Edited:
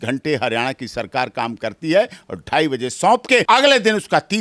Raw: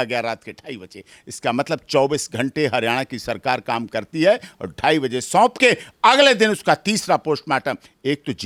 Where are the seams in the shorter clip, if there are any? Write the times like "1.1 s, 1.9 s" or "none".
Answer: 3.4 s